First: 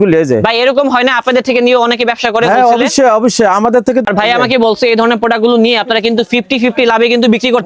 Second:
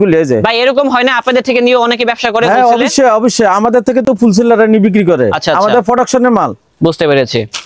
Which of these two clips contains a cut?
first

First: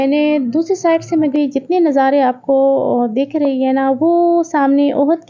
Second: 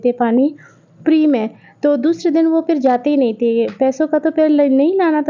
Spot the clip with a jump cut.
first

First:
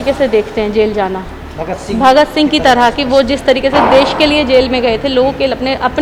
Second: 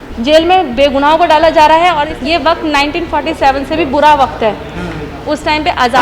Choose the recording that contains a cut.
second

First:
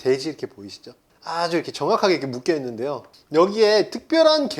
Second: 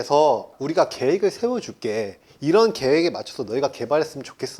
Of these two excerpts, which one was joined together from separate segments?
first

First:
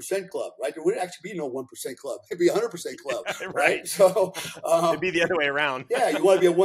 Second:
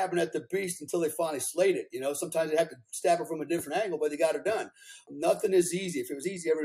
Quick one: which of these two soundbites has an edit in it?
second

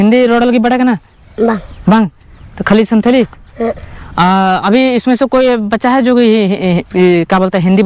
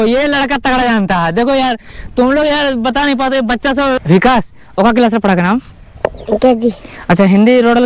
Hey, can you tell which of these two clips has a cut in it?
second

